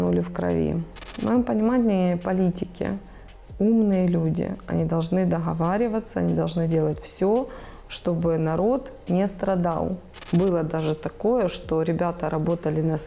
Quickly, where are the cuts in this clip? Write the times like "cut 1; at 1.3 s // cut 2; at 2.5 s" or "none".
cut 1; at 1.0 s // cut 2; at 10.1 s